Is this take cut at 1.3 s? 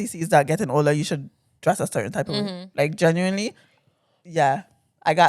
no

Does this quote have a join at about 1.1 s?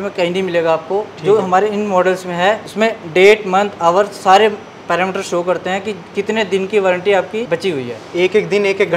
no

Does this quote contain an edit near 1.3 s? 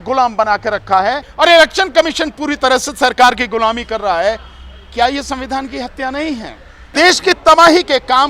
yes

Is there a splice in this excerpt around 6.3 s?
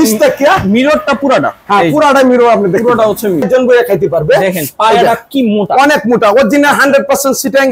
no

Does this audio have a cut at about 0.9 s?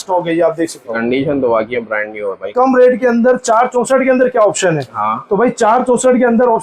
yes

